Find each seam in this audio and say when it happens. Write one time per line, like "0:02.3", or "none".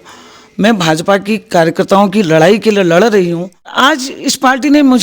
0:03.7

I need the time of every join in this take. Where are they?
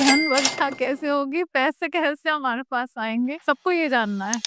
0:03.4

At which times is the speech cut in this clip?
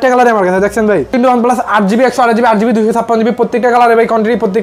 0:01.1

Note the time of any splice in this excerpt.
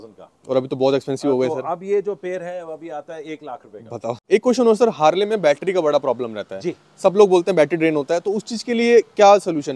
0:04.1

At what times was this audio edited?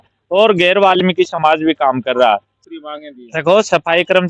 0:02.6

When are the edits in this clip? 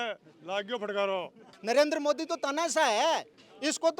0:01.5

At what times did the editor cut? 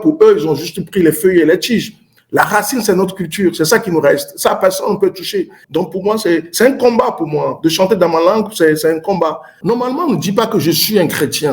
0:05.6
0:09.5

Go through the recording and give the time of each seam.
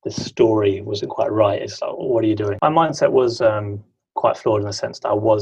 0:02.5

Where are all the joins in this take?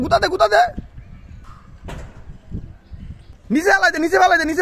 0:03.4

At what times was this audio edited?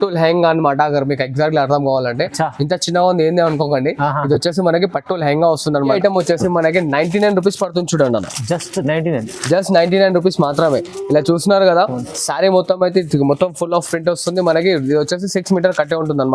0:05.9

